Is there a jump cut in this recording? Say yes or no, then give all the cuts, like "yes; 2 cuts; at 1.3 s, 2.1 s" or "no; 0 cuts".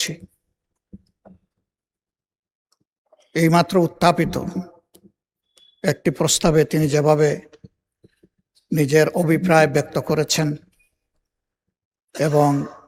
no; 0 cuts